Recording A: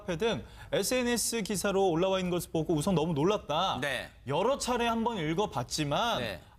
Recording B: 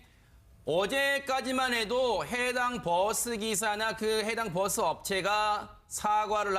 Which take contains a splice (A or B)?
B